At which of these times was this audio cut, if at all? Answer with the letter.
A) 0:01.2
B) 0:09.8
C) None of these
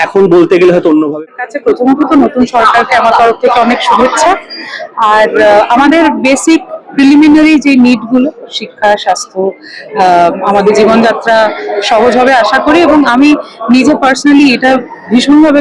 A